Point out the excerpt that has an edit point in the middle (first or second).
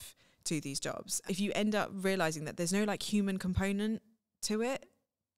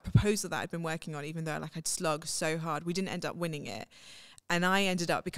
first